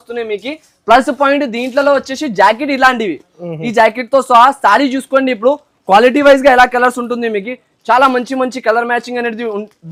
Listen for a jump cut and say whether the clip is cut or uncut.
uncut